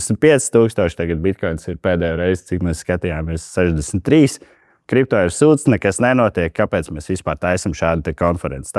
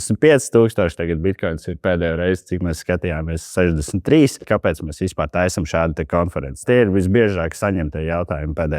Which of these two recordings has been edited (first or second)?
second